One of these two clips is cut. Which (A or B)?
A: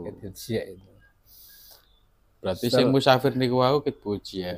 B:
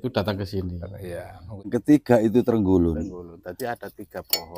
B